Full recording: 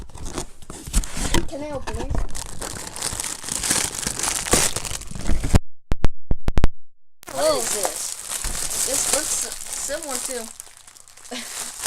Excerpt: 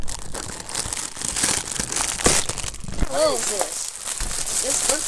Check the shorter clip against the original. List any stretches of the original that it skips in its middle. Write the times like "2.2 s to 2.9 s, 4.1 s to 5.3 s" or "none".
5.3 s to 7.3 s